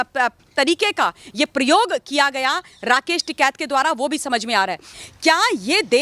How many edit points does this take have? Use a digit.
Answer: 1